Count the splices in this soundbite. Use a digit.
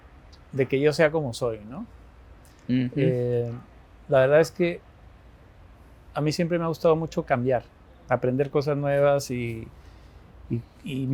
0